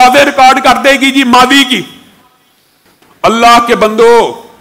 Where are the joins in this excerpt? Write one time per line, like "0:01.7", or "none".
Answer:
none